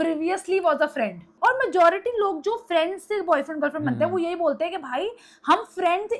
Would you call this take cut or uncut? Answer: cut